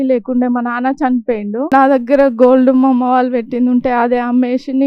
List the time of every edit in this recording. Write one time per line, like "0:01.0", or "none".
0:01.7